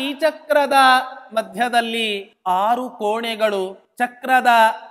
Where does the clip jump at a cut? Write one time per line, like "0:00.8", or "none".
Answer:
0:02.3
0:03.8